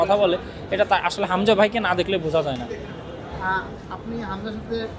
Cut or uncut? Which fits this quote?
uncut